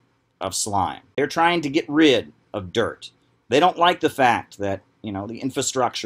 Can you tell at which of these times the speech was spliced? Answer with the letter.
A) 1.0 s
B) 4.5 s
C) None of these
A